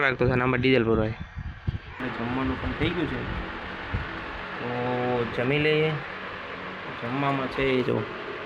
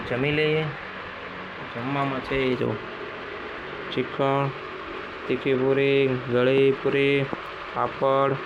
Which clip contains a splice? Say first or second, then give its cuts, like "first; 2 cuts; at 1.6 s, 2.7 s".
first; 1 cut; at 2.0 s